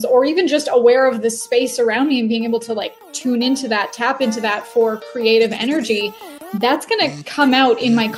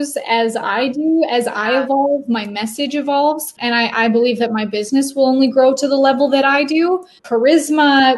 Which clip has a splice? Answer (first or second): second